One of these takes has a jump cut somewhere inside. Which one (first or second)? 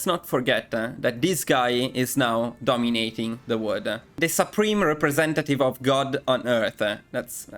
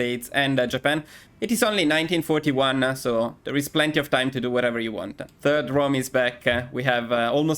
second